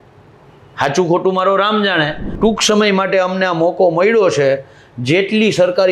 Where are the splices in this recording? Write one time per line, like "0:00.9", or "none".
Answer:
0:02.2